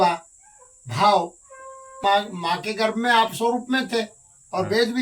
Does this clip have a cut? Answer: yes; 1 cut; at 2.0 s

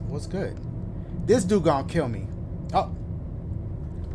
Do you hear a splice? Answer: no; 0 cuts

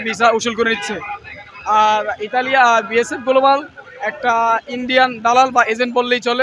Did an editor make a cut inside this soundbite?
no; 0 cuts

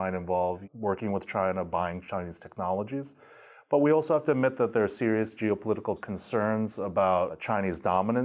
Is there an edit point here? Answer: yes; 1 cut; at 6.0 s

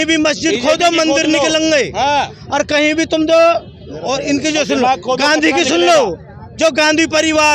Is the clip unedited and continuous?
yes; 0 cuts

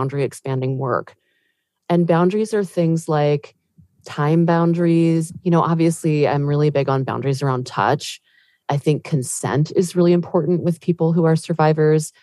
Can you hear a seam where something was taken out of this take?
yes; 2 cuts; at 5.3 s, 9.3 s

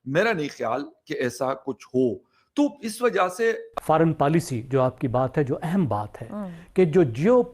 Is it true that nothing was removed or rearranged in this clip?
no; 1 cut; at 3.7 s

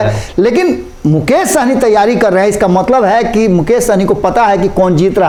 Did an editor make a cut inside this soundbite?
no; 0 cuts

